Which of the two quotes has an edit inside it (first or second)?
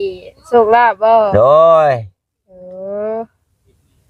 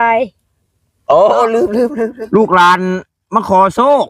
second